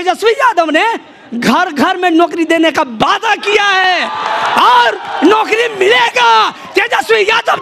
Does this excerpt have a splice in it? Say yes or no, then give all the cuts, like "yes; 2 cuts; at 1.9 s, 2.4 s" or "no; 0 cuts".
no; 0 cuts